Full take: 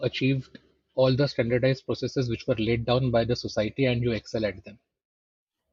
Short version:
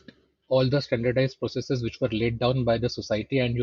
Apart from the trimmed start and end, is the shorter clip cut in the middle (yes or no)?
no